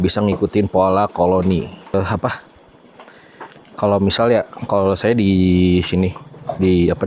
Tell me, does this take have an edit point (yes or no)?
yes